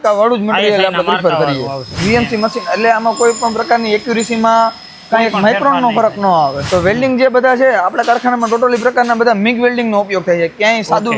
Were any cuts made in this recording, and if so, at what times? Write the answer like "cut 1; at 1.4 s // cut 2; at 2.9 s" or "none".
cut 1; at 1.9 s // cut 2; at 6.6 s